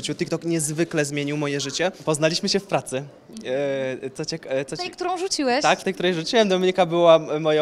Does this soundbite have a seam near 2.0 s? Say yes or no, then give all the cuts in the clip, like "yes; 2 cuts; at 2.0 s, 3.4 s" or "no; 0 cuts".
yes; 1 cut; at 2.0 s